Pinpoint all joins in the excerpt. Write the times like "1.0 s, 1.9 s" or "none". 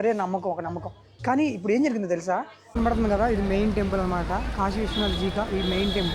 2.8 s